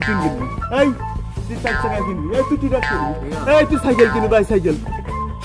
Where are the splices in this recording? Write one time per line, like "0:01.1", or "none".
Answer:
none